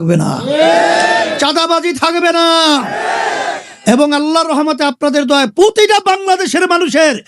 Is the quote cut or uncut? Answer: uncut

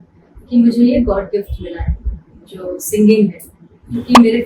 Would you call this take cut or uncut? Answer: uncut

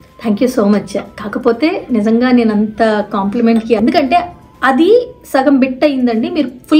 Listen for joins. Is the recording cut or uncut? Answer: cut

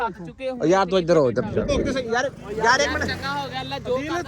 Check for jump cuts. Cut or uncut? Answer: cut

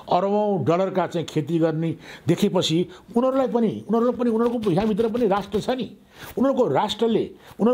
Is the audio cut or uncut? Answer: uncut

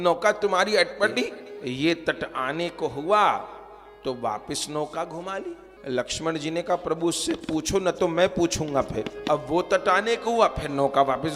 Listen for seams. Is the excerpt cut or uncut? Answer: cut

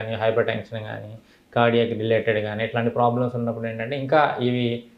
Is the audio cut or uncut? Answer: uncut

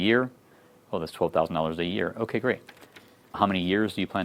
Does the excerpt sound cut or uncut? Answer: uncut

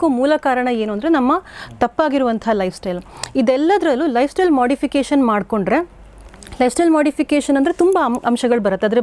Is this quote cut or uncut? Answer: uncut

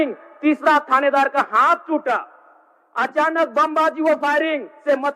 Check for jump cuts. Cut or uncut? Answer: uncut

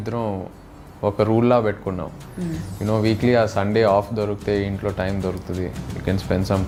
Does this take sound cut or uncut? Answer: uncut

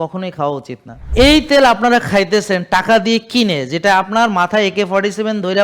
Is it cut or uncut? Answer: cut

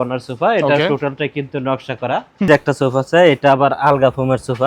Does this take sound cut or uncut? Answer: cut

